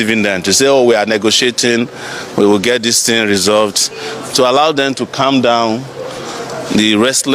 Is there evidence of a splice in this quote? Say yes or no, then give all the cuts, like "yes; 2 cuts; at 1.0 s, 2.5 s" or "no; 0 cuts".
no; 0 cuts